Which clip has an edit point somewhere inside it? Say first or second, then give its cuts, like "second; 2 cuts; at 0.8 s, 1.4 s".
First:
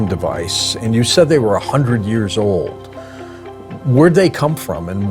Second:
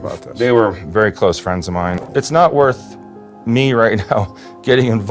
second; 1 cut; at 2.0 s